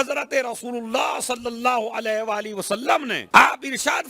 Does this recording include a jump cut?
yes; 1 cut; at 3.2 s

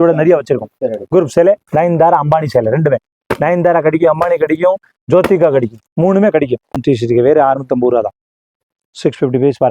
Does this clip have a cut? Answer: yes; 1 cut; at 6.8 s

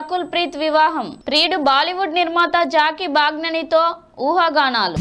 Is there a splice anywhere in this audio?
no; 0 cuts

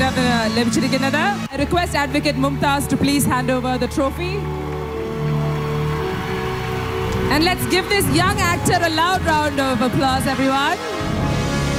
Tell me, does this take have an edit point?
no; 0 cuts

